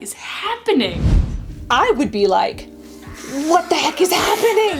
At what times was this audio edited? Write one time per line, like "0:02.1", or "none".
none